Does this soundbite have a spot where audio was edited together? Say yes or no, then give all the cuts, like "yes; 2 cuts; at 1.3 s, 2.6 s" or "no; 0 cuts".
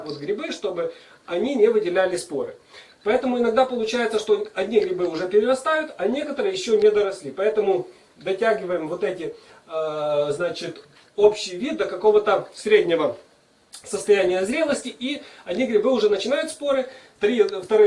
yes; 1 cut; at 10.3 s